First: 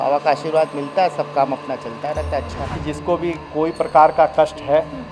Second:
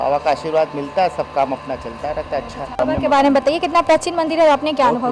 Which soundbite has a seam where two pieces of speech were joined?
first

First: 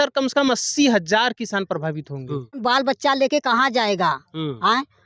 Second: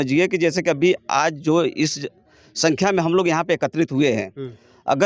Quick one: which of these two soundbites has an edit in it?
first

